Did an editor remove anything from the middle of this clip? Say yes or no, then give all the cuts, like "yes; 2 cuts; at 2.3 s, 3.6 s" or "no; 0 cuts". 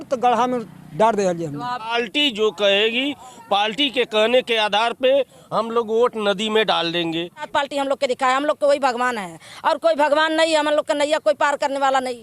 yes; 2 cuts; at 1.9 s, 7.5 s